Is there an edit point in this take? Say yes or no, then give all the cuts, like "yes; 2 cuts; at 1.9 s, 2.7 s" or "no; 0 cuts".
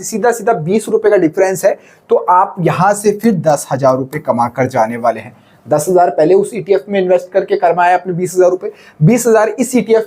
no; 0 cuts